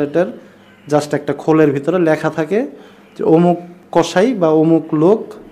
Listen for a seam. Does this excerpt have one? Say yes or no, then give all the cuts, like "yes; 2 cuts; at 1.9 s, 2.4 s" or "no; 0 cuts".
no; 0 cuts